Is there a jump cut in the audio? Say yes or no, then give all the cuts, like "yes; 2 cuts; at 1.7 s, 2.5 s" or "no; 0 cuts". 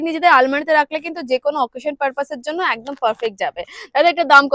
no; 0 cuts